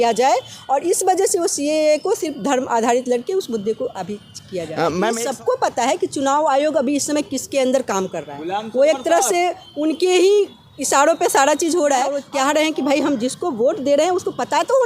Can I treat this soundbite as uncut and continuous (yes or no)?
no